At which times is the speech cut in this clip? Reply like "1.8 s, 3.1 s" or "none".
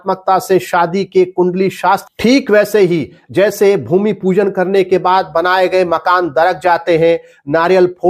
2.0 s